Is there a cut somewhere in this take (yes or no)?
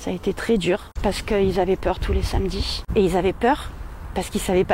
yes